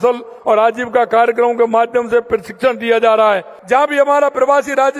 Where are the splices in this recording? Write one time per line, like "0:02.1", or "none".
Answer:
0:03.5